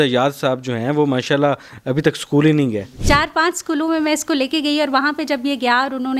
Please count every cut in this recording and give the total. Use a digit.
1